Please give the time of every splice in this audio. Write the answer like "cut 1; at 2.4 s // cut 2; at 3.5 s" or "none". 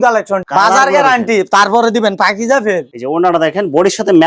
cut 1; at 2.9 s